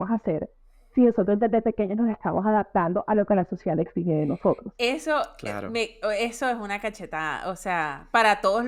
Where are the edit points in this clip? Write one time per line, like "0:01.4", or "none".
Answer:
none